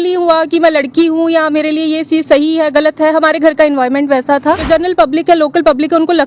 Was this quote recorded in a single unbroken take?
no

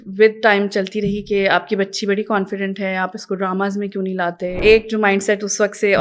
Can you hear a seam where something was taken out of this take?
yes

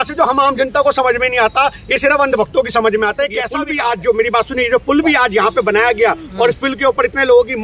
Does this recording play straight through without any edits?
no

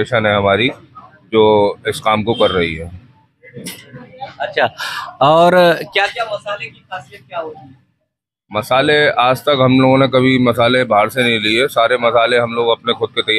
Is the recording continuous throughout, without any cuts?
yes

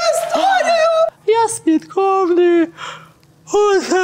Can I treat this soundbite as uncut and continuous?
no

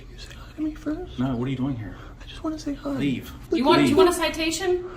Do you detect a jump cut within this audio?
yes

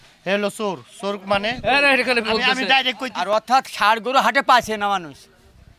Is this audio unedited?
no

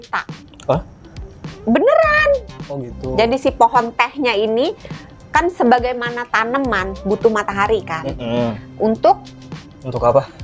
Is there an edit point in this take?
no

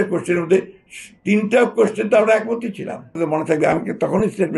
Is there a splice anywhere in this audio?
yes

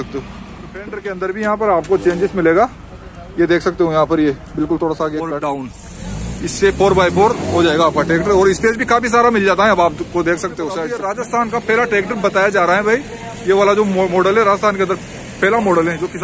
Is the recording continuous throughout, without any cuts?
no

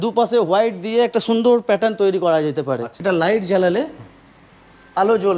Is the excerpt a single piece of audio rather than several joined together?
no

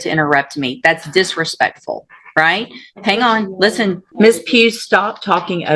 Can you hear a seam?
yes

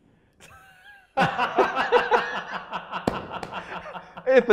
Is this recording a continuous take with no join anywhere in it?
yes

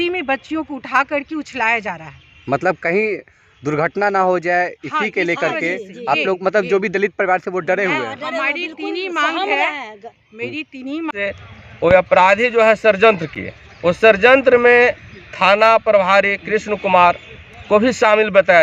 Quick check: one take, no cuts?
no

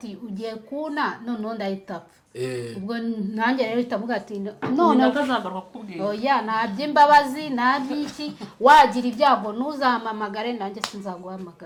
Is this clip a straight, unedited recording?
yes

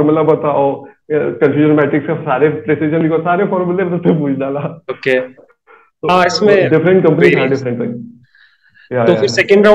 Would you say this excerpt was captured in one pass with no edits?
yes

